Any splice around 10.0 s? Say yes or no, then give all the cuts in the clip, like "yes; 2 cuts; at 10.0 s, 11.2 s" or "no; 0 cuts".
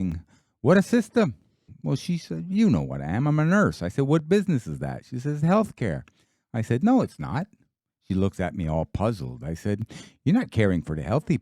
no; 1 cut; at 1.6 s